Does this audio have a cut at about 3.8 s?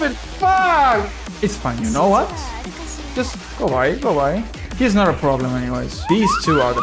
no; 2 cuts; at 1.2 s, 5.9 s

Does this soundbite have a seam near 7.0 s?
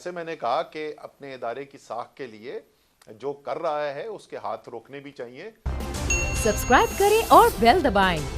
no; 1 cut; at 5.7 s

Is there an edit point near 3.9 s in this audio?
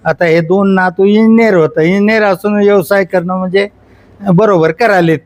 no; 0 cuts

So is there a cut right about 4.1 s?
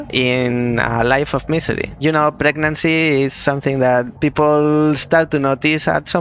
yes; 2 cuts; at 1.9 s, 4.1 s

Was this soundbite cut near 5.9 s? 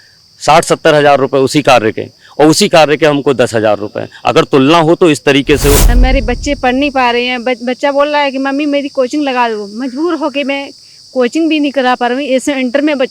yes; 1 cut; at 5.9 s

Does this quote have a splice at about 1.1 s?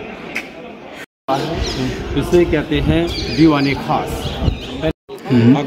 yes; 2 cuts; at 1.1 s, 4.9 s

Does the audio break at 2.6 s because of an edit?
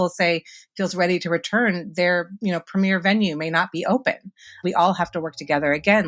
no; 1 cut; at 4.6 s

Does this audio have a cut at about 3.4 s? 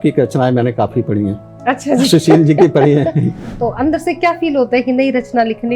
yes; 1 cut; at 3.4 s

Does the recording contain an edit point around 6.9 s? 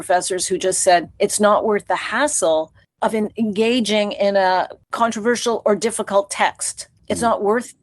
no; 2 cuts; at 1.1 s, 4.8 s

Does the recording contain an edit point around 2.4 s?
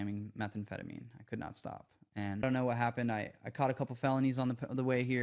yes; 1 cut; at 2.4 s

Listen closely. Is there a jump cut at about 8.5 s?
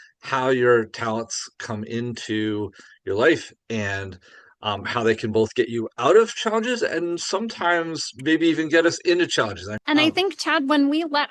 no; 1 cut; at 9.7 s

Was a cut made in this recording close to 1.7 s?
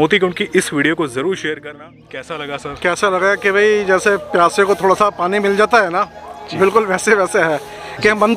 yes; 1 cut; at 1.7 s

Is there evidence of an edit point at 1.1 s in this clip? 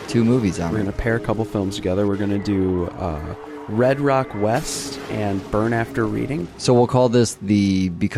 no; 0 cuts

